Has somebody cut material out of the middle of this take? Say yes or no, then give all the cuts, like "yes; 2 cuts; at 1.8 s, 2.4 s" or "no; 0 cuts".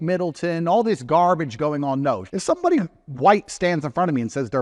yes; 1 cut; at 2.3 s